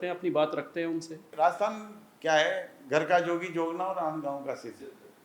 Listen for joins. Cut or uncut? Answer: cut